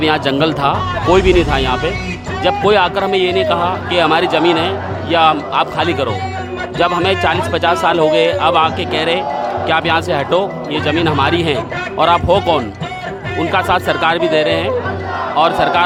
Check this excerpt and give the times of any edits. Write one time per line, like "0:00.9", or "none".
none